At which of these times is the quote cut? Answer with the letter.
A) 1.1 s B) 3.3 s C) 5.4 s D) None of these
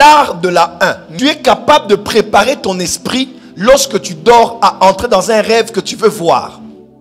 A